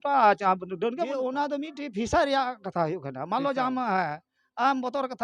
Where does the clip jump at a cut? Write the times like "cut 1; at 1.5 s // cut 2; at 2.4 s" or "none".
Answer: cut 1; at 1.0 s